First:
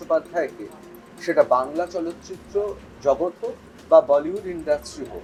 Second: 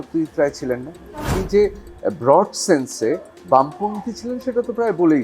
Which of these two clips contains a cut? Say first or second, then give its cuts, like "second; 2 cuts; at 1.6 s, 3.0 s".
second; 1 cut; at 1.3 s